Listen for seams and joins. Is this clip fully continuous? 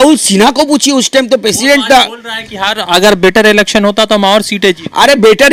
yes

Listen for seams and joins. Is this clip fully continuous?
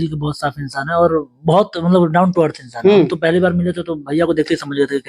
yes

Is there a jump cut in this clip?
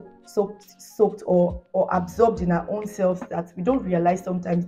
no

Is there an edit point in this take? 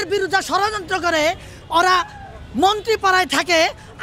no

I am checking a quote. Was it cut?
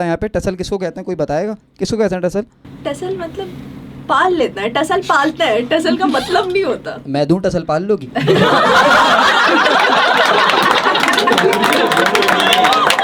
no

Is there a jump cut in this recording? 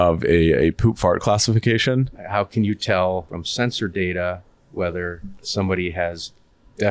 yes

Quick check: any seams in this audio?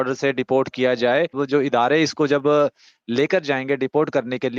yes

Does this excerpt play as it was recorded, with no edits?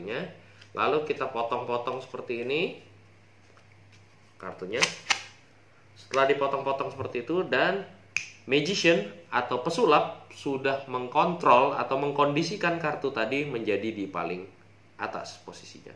yes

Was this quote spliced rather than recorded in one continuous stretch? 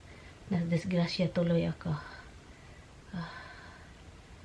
no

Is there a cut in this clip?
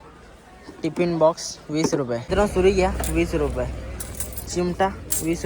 yes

